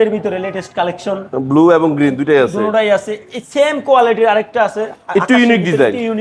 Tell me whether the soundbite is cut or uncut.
uncut